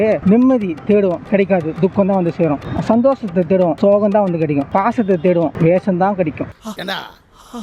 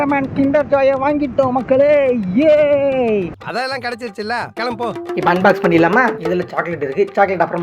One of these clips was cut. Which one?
second; 1 cut; at 6.2 s

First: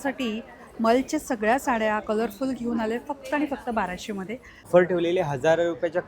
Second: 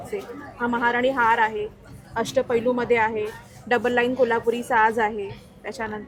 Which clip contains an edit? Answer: first; 1 cut; at 4.7 s

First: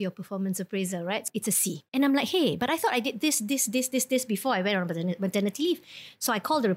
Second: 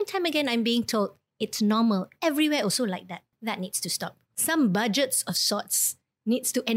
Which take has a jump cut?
first; 1 cut; at 1.2 s

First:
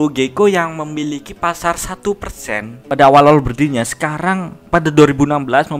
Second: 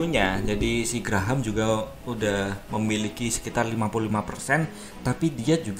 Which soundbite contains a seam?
first; 1 cut; at 2.7 s

